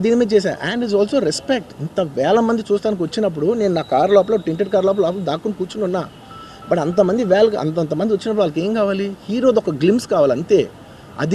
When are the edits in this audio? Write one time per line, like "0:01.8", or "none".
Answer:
none